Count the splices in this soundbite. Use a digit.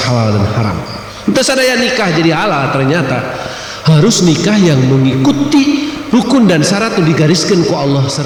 0